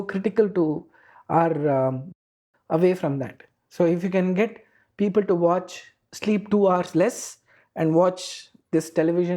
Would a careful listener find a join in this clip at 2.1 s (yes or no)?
yes